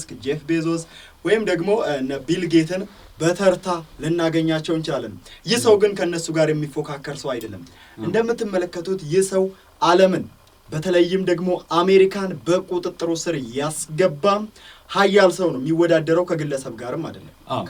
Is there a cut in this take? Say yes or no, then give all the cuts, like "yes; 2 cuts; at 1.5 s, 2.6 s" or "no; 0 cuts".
no; 0 cuts